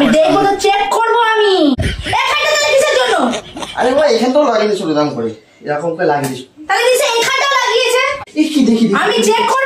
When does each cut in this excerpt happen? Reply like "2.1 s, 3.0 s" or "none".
1.8 s, 8.2 s